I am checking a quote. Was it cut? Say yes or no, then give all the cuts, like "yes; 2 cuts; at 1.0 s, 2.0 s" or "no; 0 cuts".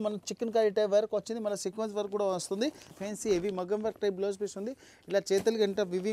yes; 1 cut; at 2.9 s